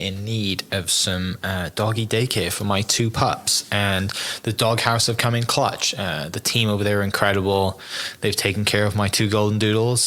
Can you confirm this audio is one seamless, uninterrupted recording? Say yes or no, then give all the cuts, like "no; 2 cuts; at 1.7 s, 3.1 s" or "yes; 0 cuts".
yes; 0 cuts